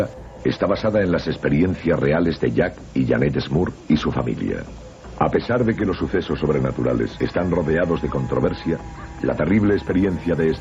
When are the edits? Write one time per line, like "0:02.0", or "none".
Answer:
none